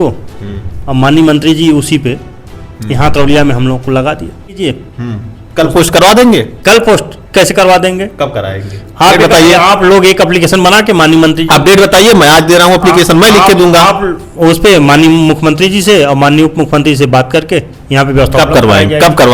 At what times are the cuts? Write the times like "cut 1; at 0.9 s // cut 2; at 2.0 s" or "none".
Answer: cut 1; at 4.6 s